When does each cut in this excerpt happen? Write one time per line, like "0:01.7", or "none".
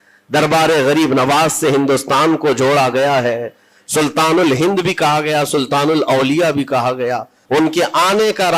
0:07.3